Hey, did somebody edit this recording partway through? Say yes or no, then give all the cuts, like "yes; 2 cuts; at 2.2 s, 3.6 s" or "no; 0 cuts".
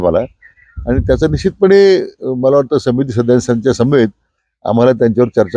no; 0 cuts